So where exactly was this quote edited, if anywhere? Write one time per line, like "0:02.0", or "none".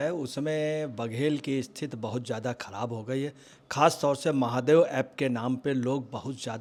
none